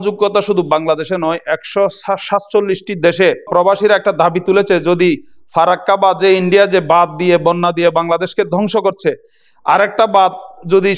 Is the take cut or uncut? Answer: cut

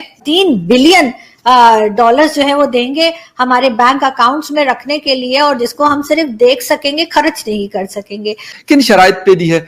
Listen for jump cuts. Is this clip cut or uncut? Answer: cut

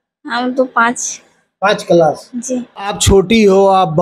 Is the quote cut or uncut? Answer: cut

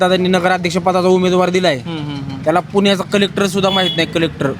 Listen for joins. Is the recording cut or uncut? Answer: uncut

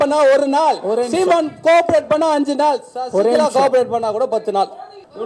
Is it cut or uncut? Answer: uncut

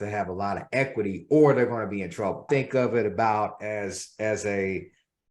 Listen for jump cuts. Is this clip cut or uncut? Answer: cut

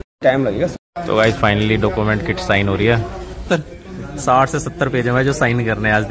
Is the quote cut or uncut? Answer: cut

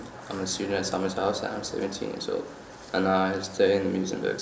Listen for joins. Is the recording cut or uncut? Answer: cut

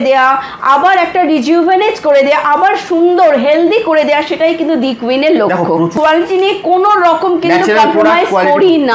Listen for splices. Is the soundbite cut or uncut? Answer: cut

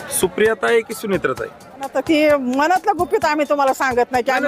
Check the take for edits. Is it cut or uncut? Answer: cut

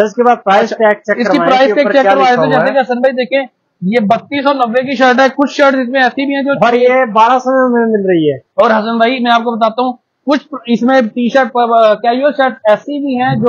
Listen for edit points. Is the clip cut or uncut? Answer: uncut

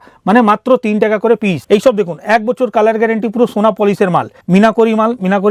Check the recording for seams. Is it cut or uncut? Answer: cut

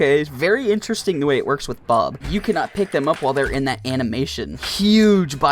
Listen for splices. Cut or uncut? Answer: cut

